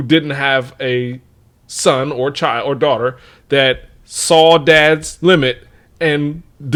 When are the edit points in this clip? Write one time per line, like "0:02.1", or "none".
none